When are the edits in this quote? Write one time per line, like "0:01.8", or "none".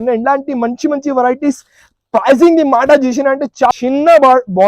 0:03.7